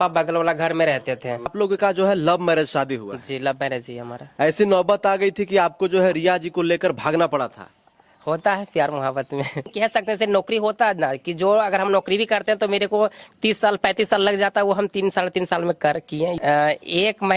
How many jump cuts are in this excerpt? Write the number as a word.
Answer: three